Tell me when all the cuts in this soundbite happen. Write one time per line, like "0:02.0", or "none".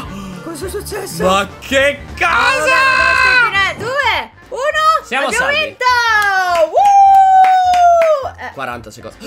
0:03.7